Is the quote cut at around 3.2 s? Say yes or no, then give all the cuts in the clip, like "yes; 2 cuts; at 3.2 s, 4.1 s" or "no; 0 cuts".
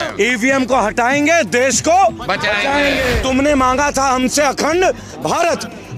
yes; 1 cut; at 3.2 s